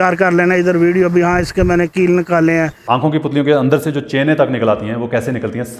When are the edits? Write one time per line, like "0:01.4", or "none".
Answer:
0:02.8